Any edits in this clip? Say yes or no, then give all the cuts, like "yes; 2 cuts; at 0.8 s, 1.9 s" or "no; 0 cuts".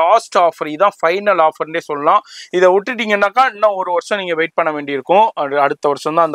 no; 0 cuts